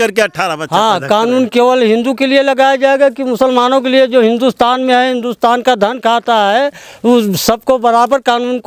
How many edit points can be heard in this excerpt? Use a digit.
0